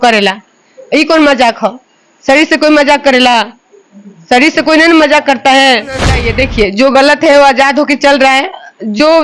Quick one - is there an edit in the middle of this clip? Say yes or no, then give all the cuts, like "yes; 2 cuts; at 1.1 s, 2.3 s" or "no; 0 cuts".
yes; 1 cut; at 6.2 s